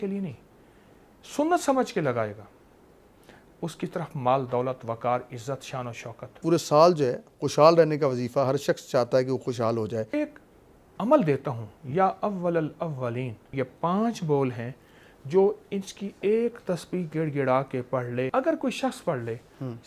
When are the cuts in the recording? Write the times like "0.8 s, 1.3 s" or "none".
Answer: 6.4 s, 10.1 s, 13.5 s, 18.3 s